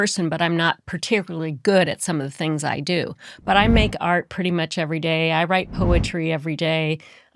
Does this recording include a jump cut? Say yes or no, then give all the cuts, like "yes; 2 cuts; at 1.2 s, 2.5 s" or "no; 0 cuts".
no; 0 cuts